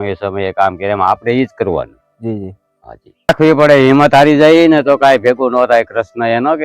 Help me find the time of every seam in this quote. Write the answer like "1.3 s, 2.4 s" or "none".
3.3 s